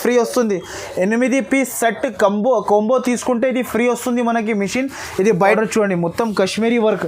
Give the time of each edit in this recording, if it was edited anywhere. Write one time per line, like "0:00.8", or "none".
0:05.4